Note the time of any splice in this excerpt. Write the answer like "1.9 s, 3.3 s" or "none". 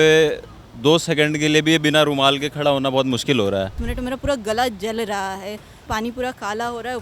3.8 s, 5.9 s